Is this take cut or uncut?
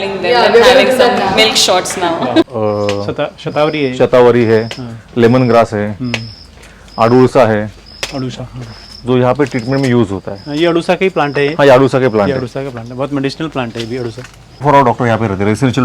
cut